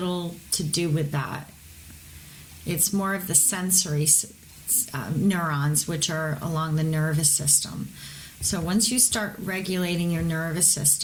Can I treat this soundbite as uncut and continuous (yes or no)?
yes